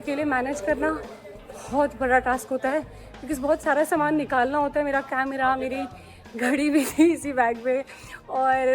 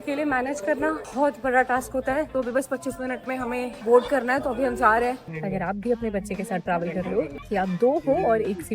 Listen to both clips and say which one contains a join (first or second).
second